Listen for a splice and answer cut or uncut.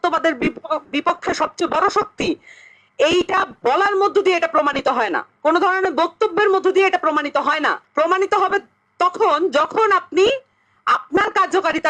cut